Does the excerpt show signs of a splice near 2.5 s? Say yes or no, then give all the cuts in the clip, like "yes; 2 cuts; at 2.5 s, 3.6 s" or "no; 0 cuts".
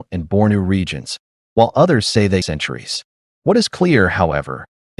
yes; 1 cut; at 2.5 s